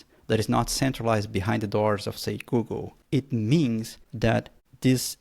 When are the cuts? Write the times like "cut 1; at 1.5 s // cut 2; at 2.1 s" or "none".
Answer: cut 1; at 2.9 s // cut 2; at 4.3 s